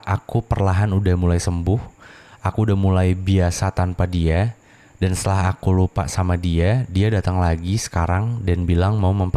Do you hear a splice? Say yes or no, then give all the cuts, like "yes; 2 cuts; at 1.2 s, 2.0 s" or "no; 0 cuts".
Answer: no; 0 cuts